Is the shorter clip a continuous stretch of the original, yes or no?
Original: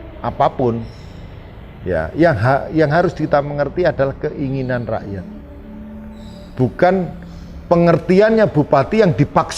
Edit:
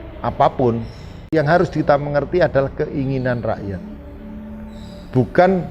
no